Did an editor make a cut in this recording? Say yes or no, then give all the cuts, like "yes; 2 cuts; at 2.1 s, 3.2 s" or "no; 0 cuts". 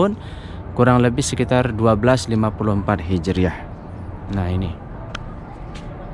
no; 0 cuts